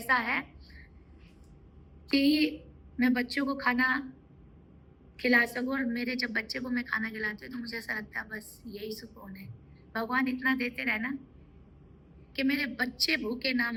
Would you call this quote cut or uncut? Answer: uncut